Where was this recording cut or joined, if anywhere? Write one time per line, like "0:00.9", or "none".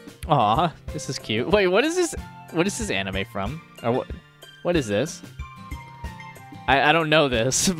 none